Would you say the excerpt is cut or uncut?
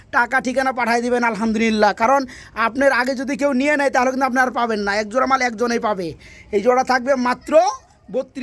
uncut